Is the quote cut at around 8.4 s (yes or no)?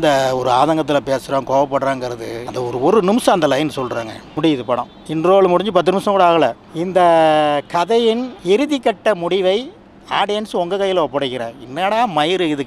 no